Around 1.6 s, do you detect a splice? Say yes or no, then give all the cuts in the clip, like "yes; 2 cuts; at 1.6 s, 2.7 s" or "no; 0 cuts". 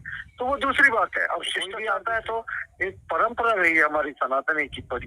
yes; 1 cut; at 1.6 s